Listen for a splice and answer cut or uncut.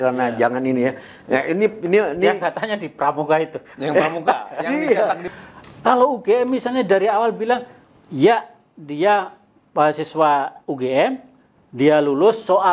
cut